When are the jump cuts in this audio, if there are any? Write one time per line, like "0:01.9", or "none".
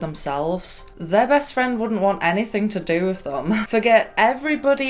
0:03.6